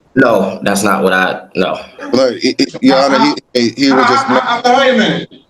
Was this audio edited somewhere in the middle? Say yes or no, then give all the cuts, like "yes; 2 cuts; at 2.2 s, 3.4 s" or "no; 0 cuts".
yes; 2 cuts; at 1.9 s, 3.4 s